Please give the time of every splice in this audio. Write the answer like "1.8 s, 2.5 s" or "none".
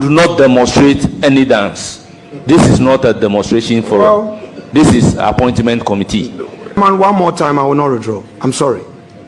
6.8 s